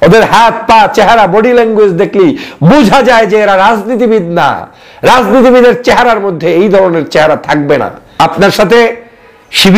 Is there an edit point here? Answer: yes; 1 cut; at 8.0 s

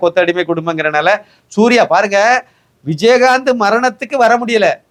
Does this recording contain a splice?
no; 0 cuts

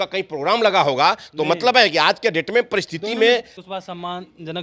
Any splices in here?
yes; 1 cut; at 3.6 s

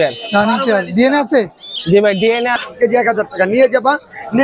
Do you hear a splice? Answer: yes; 1 cut; at 2.6 s

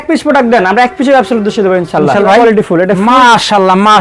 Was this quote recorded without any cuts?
no; 1 cut; at 2.2 s

